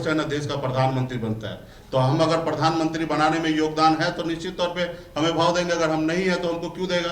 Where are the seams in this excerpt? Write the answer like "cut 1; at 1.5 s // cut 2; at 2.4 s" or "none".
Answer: none